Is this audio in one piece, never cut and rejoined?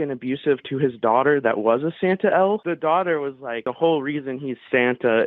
no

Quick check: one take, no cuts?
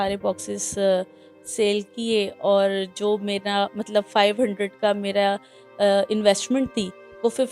yes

